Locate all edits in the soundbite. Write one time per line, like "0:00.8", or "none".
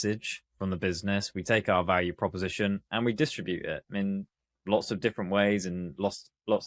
none